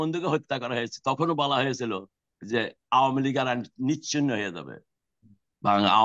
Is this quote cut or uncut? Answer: uncut